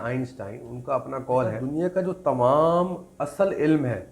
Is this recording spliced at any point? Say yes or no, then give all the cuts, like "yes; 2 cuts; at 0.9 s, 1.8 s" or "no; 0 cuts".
yes; 1 cut; at 1.6 s